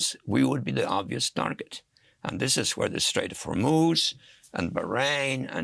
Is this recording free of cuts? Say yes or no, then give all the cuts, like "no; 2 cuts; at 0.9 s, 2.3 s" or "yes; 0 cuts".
yes; 0 cuts